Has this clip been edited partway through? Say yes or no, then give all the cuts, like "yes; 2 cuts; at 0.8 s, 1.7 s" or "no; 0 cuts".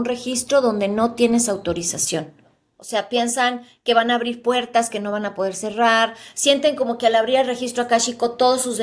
yes; 1 cut; at 2.6 s